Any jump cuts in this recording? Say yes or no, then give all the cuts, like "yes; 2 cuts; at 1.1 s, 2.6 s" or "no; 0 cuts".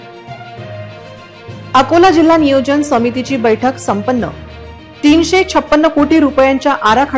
no; 0 cuts